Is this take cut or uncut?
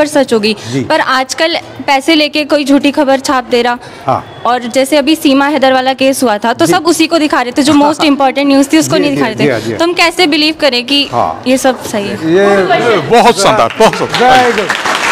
uncut